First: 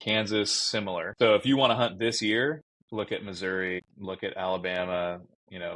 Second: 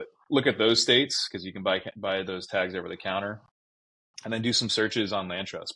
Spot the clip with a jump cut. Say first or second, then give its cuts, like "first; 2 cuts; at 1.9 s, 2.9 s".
first; 3 cuts; at 1.1 s, 2.7 s, 3.9 s